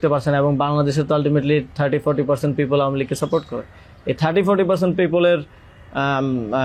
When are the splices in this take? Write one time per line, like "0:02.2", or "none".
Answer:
none

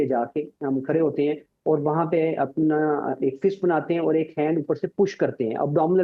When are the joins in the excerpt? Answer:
none

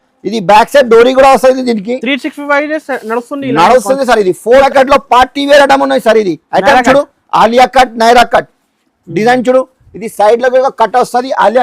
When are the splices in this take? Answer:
0:04.6

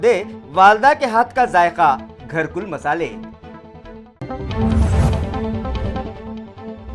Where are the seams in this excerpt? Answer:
0:04.1

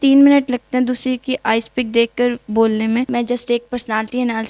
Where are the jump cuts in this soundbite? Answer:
0:03.1

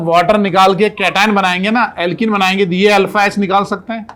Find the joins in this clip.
none

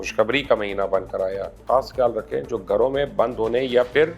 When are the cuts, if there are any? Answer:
0:01.6

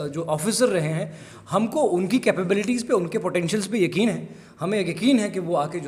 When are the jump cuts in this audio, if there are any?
none

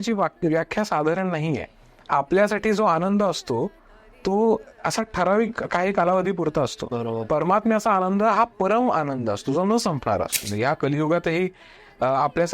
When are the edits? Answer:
0:10.4

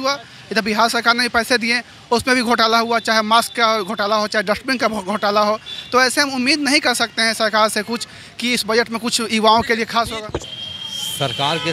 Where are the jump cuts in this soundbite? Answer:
0:10.5

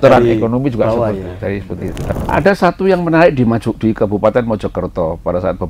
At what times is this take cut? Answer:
0:02.0

